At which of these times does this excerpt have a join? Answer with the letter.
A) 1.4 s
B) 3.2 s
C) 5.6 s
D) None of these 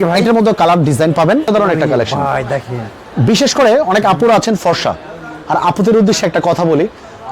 A